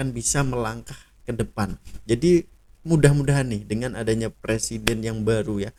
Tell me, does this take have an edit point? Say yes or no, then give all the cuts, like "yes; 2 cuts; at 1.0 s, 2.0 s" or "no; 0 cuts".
no; 0 cuts